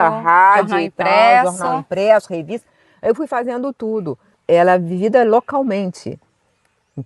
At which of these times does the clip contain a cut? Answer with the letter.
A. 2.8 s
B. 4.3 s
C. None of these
B